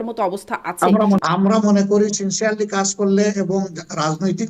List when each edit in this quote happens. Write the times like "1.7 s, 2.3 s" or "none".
1.2 s